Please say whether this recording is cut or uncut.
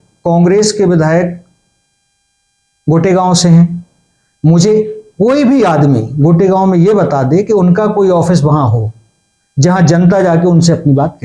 uncut